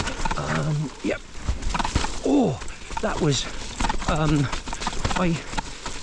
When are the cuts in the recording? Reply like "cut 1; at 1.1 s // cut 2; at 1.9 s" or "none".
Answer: none